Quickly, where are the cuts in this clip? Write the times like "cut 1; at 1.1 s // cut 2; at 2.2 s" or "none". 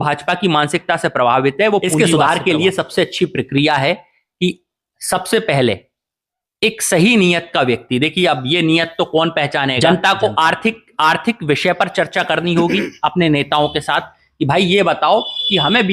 cut 1; at 1.9 s // cut 2; at 9.8 s